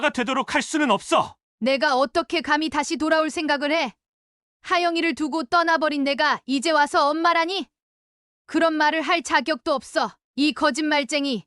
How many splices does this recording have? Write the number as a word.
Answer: one